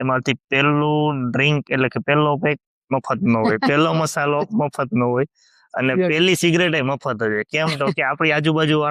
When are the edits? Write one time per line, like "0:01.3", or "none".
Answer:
none